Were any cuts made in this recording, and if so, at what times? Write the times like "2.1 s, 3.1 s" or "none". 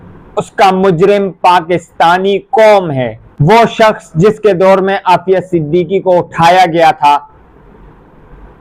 none